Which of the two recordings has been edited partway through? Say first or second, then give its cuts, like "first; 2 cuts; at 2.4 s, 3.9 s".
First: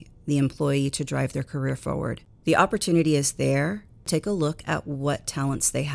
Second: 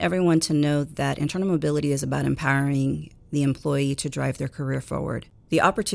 first; 1 cut; at 4.0 s